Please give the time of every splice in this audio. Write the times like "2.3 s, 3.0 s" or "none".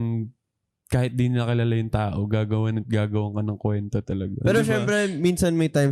4.3 s